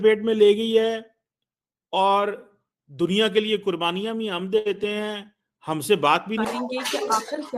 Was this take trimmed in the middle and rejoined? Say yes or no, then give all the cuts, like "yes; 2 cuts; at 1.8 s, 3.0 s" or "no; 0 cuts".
yes; 1 cut; at 6.4 s